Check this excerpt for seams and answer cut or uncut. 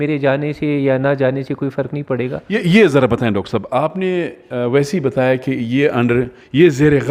uncut